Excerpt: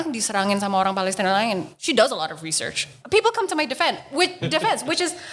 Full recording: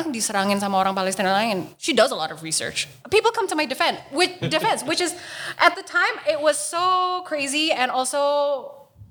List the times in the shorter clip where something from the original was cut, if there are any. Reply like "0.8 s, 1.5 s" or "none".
none